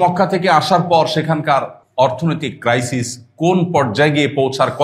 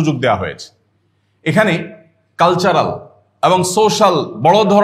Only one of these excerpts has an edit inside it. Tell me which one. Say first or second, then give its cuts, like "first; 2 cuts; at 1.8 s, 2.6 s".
first; 1 cut; at 1.8 s